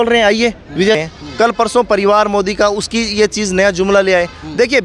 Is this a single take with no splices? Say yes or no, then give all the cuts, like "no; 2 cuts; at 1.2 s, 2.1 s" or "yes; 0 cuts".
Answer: no; 1 cut; at 1.0 s